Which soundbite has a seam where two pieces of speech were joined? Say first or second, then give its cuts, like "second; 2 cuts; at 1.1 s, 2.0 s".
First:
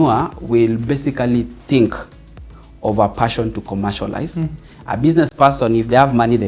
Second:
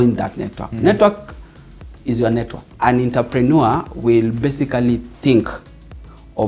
second; 1 cut; at 2.6 s